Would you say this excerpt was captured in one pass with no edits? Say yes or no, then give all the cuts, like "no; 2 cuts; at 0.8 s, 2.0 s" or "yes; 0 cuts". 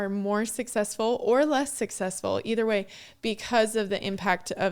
yes; 0 cuts